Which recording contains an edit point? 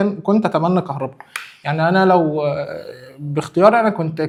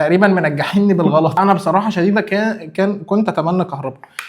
second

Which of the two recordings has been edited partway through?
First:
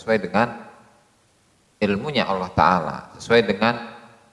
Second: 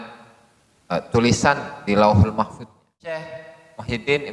second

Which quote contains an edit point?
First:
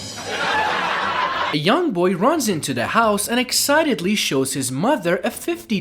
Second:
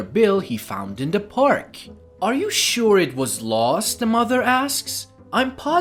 first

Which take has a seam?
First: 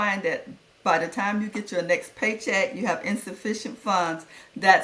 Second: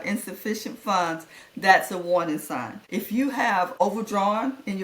second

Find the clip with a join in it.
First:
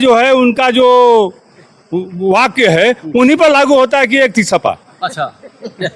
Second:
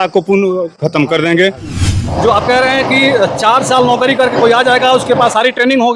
second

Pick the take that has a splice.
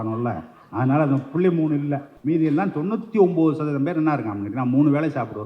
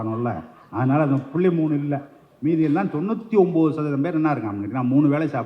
first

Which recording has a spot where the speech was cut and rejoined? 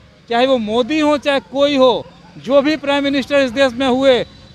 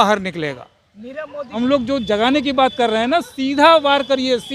second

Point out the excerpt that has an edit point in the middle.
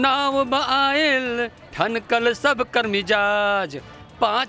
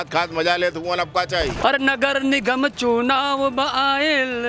second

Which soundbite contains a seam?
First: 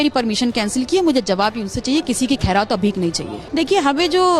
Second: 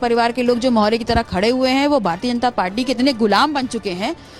first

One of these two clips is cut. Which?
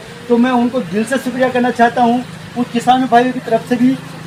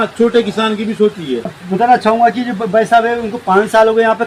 second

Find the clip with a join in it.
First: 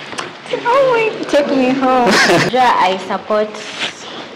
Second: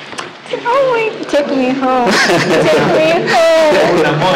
first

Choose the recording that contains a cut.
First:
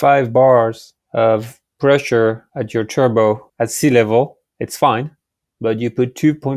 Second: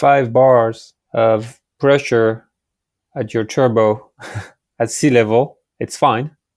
first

